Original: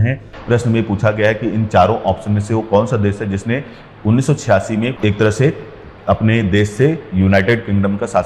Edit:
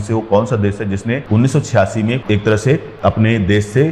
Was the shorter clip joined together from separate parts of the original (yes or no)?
yes